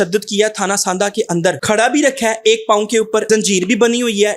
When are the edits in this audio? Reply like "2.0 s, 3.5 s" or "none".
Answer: 1.6 s, 3.2 s